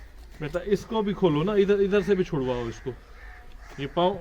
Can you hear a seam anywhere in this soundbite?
no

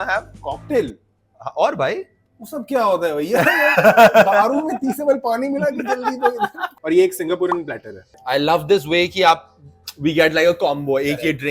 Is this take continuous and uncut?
yes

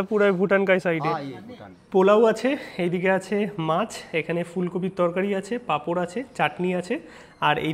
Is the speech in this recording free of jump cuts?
no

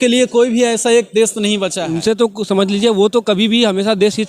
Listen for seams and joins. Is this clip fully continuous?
no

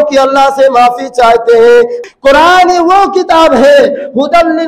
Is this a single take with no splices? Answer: no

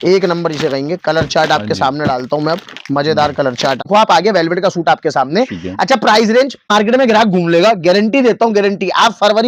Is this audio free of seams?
no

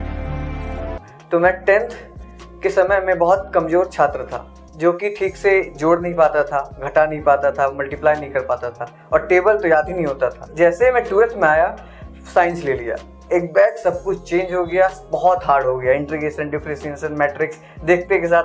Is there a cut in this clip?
yes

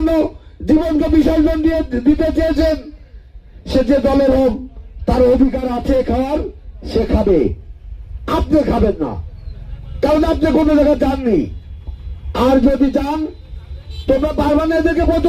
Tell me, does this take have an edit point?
no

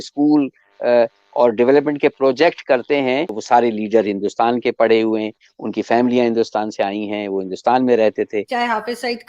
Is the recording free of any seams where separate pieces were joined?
no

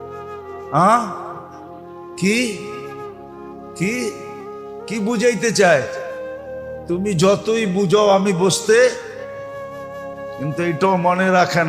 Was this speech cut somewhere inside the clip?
yes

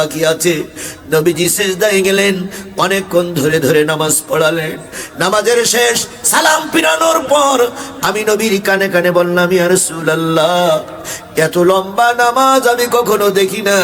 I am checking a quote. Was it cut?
no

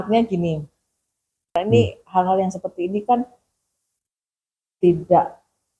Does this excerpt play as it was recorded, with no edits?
no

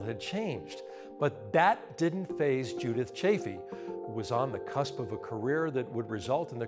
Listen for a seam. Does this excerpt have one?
yes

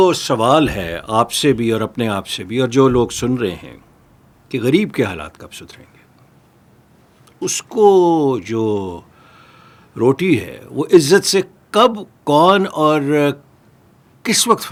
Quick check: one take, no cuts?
yes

